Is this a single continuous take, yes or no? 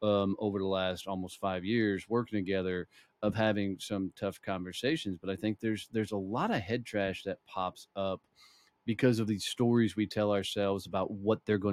yes